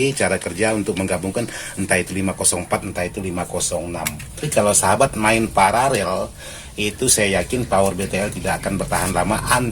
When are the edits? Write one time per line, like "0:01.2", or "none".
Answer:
0:04.4